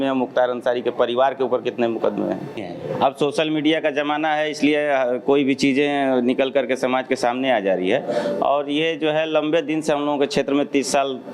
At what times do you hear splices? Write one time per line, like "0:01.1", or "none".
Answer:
0:02.7